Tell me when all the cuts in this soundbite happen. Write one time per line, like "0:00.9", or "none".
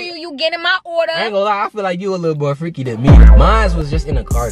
none